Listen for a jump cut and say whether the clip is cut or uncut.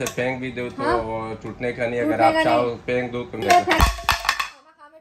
cut